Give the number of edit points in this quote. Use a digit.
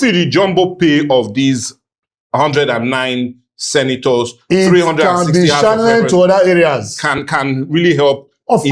0